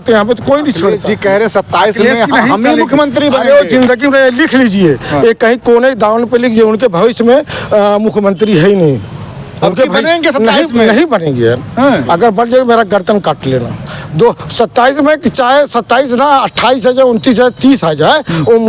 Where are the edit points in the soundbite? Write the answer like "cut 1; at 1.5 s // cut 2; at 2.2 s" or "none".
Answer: cut 1; at 1.1 s